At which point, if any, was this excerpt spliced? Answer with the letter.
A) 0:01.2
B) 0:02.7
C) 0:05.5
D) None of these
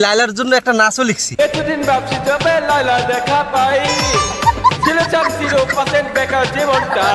A